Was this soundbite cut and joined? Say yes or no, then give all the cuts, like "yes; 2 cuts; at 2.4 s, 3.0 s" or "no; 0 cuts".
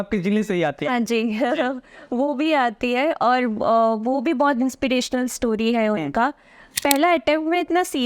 yes; 1 cut; at 6.7 s